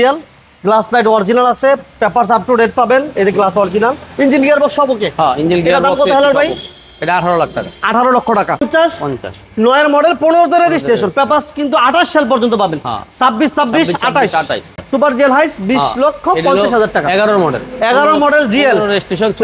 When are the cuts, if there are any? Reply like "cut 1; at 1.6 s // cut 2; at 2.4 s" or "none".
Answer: cut 1; at 8.6 s // cut 2; at 14.7 s